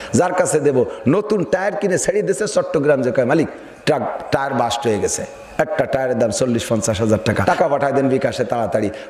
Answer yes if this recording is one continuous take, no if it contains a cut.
no